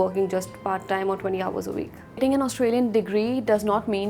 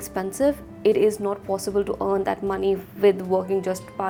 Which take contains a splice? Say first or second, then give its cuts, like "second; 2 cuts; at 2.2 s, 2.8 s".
first; 1 cut; at 2.1 s